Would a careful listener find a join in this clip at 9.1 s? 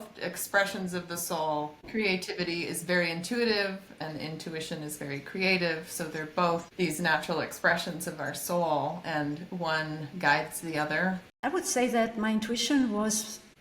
no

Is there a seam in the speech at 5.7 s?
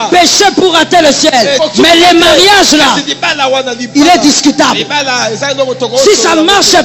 no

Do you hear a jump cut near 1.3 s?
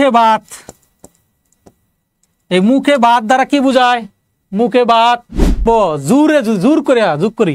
no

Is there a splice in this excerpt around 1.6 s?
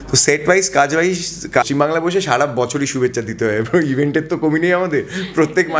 yes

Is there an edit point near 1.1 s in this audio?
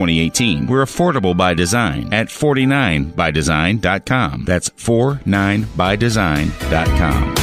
no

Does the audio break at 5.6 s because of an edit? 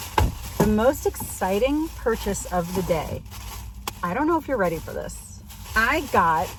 no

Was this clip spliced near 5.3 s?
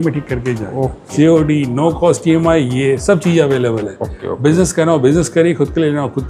no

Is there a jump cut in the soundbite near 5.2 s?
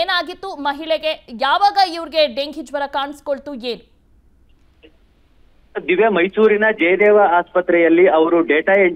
yes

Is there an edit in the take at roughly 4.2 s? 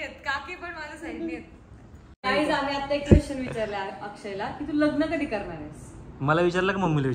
no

